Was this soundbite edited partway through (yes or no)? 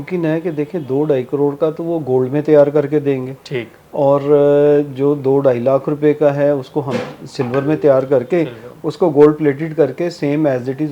no